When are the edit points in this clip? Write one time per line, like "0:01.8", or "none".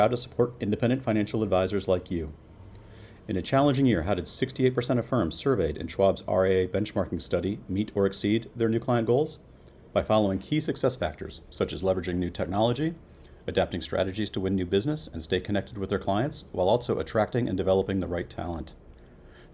none